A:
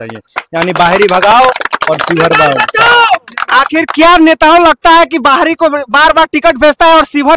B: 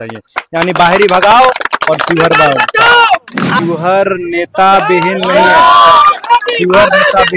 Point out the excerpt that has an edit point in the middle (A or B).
B